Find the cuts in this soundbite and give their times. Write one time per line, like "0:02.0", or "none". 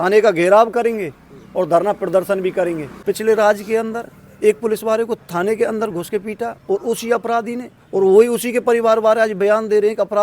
0:02.9